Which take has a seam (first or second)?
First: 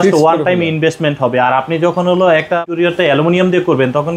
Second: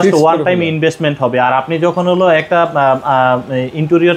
first